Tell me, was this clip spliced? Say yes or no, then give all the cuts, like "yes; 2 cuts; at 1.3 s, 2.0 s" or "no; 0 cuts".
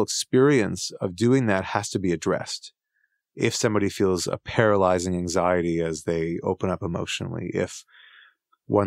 no; 0 cuts